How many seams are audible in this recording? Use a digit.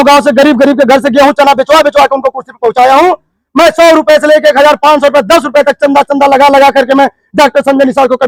0